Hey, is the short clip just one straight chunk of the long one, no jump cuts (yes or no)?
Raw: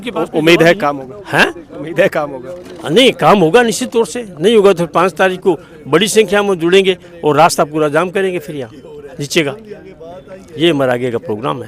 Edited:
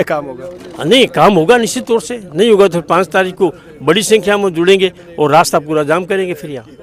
yes